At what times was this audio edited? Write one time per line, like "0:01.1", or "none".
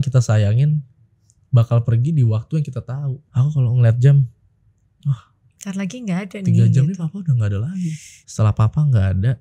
0:03.2
0:08.1